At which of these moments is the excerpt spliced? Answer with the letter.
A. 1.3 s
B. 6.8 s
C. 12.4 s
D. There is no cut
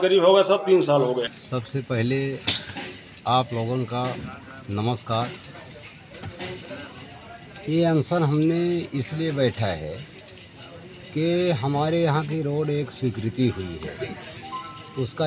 A